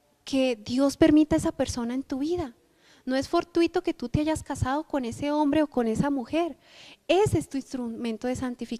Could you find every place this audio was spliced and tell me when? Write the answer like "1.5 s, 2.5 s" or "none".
2.6 s